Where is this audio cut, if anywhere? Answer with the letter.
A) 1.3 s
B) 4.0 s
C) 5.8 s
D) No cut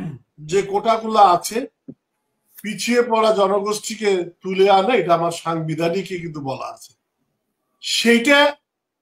D